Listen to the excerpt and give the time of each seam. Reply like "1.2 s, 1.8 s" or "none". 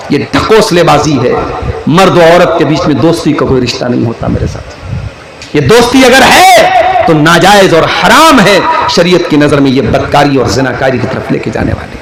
none